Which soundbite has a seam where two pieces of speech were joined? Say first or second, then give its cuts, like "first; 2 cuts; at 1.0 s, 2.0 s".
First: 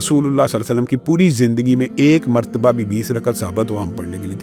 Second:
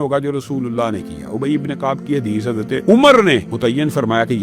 second; 2 cuts; at 2.8 s, 3.5 s